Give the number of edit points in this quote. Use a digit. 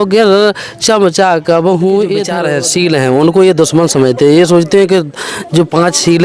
1